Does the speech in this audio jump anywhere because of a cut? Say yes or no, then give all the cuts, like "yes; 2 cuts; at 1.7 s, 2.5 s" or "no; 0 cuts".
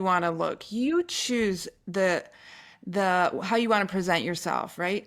no; 0 cuts